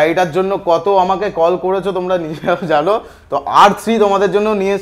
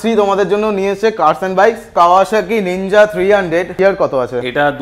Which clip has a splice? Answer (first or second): second